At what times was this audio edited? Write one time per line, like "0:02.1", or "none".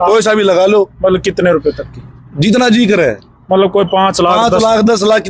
none